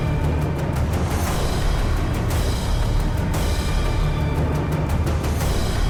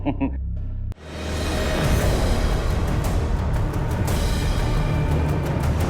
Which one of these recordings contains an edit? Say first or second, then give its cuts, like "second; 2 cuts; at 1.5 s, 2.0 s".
second; 1 cut; at 1.1 s